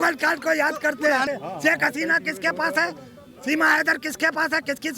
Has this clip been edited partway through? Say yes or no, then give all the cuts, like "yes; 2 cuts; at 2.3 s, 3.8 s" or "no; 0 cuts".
yes; 1 cut; at 1.2 s